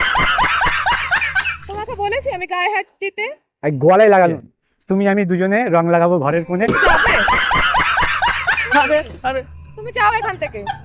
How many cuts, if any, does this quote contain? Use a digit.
1